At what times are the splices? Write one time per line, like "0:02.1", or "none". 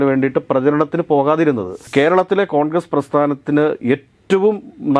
0:01.8